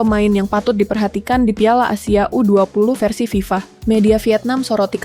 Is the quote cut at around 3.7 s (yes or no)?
yes